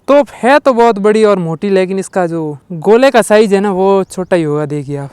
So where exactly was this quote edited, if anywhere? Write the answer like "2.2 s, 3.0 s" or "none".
2.6 s